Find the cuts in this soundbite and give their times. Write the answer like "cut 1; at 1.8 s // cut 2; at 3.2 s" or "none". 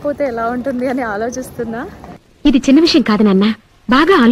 none